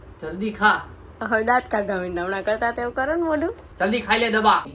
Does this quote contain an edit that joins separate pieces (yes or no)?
yes